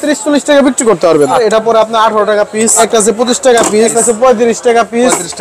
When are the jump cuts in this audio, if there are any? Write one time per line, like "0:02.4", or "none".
0:01.4
0:02.8
0:03.9